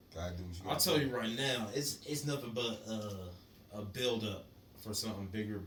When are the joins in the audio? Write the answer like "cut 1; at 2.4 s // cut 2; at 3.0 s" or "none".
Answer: none